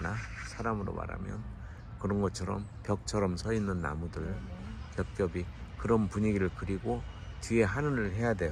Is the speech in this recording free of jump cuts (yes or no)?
yes